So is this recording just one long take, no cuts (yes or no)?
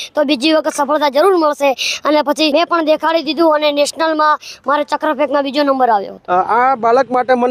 no